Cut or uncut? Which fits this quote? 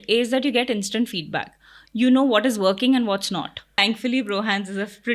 cut